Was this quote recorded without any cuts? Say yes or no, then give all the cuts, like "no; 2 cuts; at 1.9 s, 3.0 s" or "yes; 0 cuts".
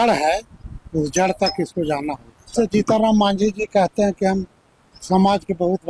no; 1 cut; at 2.5 s